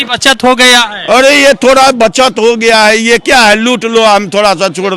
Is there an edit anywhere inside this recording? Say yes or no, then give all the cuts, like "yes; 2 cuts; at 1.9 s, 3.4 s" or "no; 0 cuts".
no; 0 cuts